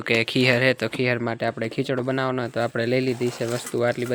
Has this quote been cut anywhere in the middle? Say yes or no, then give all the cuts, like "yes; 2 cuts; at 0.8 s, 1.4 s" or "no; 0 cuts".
no; 0 cuts